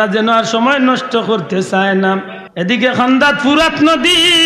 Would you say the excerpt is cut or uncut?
cut